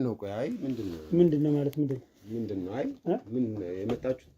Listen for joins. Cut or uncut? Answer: uncut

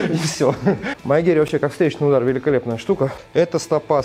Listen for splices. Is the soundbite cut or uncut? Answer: cut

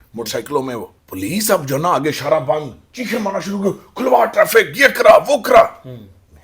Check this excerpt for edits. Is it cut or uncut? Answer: cut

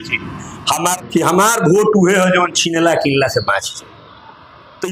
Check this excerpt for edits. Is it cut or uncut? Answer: cut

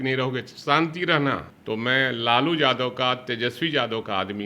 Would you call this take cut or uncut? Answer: cut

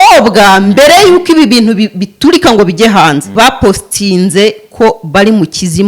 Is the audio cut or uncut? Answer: cut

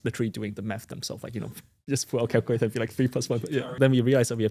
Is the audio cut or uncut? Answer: cut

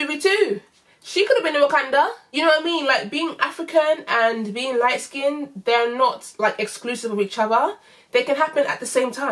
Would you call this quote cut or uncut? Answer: uncut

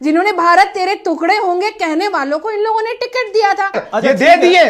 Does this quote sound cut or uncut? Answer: uncut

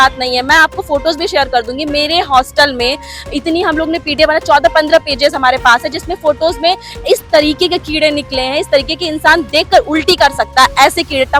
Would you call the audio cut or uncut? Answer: uncut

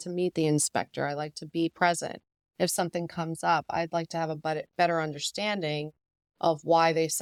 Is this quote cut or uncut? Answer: uncut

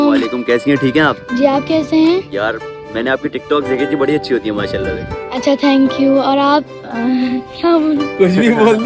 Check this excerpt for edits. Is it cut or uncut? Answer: uncut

